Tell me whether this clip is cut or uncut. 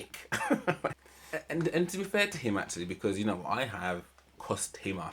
cut